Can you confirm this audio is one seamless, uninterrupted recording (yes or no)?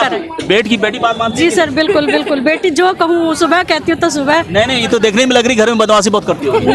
yes